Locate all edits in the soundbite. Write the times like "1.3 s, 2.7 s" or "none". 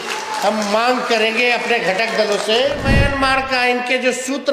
2.9 s